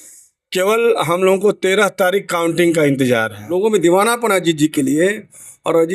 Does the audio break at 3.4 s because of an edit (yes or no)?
yes